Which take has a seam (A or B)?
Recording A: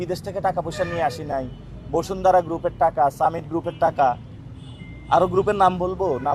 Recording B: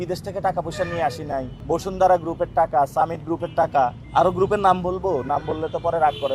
B